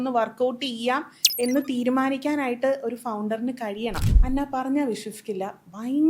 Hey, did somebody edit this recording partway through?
yes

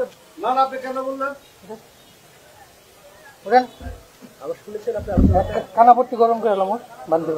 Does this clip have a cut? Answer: no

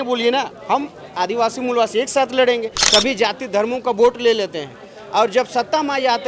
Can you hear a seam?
yes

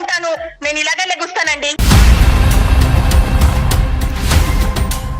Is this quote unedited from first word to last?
no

